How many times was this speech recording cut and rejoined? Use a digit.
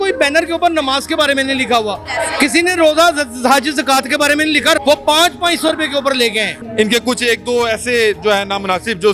2